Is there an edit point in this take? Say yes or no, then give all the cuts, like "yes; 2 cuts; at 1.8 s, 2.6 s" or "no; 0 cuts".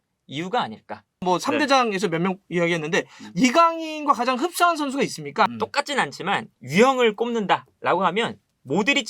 yes; 2 cuts; at 1.2 s, 5.5 s